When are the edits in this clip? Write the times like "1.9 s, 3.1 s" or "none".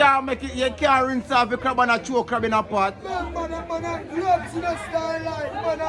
none